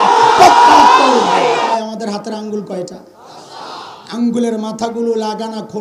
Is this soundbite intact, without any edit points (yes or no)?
no